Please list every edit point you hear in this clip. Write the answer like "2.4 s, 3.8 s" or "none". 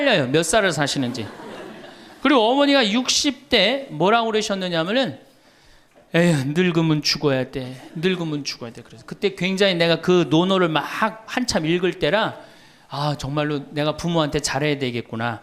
none

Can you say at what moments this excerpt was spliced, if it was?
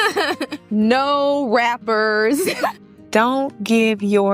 2.7 s

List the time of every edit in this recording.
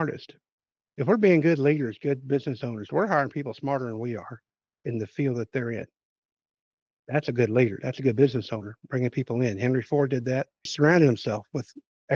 10.7 s

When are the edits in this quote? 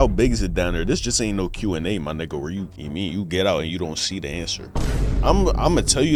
none

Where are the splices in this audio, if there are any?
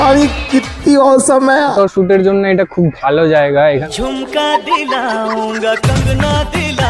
1.7 s, 3.8 s

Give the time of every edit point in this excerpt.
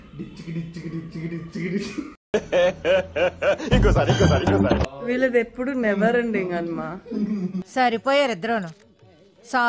4.9 s

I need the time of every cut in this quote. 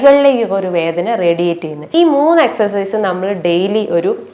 1.8 s

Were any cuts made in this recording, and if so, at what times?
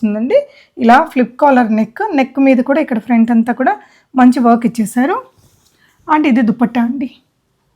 none

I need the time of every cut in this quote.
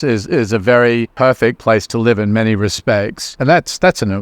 1.1 s, 3.3 s

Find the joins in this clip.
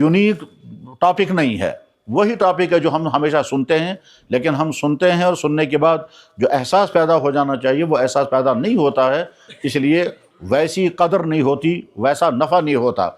none

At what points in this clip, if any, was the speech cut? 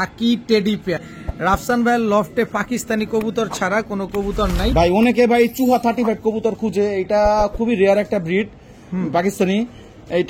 1.1 s, 4.7 s

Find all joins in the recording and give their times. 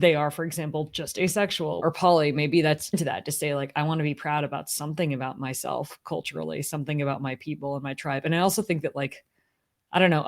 1.8 s, 2.9 s

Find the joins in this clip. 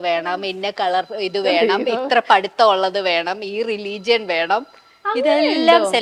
none

